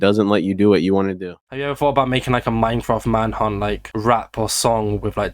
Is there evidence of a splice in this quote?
yes; 1 cut; at 1.4 s

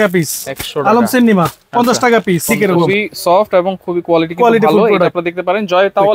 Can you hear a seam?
yes; 1 cut; at 2.7 s

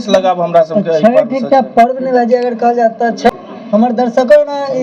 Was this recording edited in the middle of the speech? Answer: yes; 1 cut; at 3.3 s

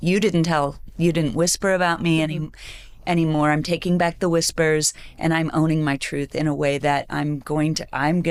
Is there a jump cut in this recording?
no; 0 cuts

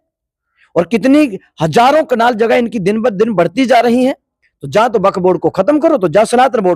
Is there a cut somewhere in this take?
no; 0 cuts

